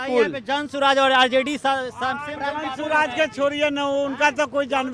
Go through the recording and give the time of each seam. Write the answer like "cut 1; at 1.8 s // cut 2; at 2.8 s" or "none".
none